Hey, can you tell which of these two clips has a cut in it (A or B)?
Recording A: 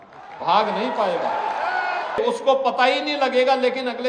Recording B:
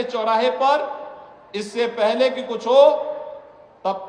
A